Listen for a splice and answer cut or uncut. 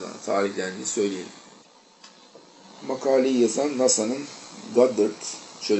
cut